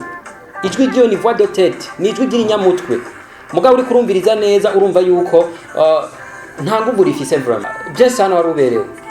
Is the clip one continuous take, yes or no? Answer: no